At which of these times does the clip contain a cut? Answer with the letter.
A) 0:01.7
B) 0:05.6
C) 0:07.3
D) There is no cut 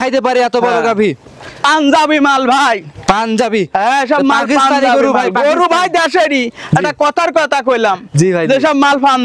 A